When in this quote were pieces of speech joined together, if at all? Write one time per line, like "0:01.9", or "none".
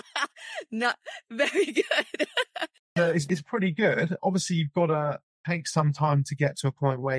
0:05.4